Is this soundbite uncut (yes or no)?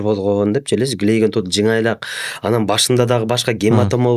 yes